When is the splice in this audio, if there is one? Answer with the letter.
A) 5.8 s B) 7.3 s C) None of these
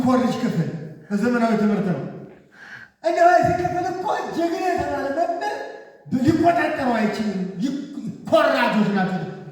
C